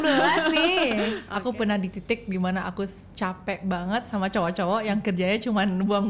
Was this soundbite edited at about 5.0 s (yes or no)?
no